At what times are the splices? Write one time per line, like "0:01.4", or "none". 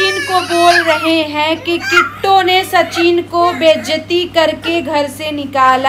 none